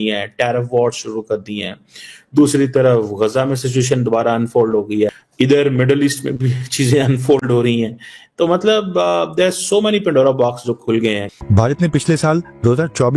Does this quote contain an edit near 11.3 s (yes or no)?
yes